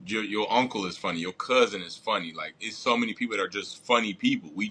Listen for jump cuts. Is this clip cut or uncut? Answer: uncut